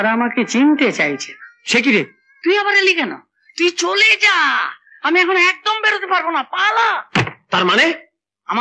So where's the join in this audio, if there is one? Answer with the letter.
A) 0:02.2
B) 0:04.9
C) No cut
A